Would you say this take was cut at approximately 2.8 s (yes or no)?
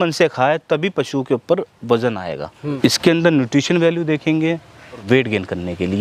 yes